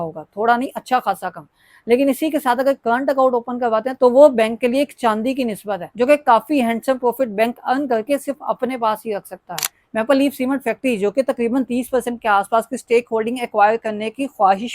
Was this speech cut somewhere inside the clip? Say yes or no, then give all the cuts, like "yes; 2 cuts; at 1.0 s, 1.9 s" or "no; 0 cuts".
yes; 1 cut; at 9.5 s